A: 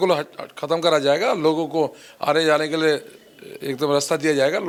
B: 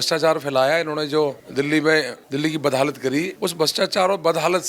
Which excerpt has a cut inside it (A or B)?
B